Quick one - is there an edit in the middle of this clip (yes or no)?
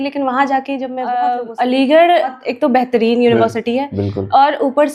yes